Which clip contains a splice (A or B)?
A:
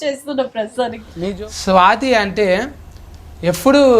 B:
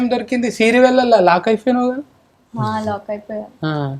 A